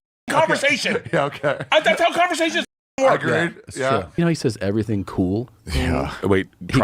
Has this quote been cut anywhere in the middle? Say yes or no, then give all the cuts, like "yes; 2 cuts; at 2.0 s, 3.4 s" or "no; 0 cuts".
yes; 1 cut; at 4.2 s